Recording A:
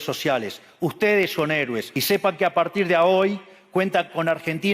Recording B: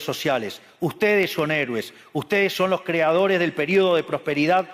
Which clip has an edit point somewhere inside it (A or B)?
A